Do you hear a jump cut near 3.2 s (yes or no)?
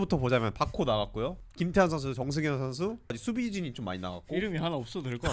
yes